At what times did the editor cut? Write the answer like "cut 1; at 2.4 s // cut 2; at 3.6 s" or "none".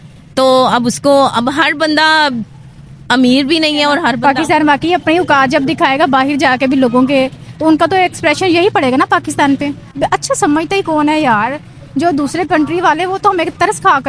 cut 1; at 4.1 s // cut 2; at 9.9 s